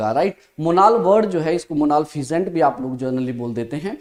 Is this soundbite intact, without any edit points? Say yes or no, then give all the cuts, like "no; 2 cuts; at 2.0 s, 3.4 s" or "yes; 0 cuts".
yes; 0 cuts